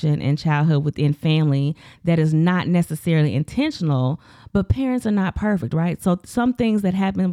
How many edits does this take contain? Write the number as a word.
zero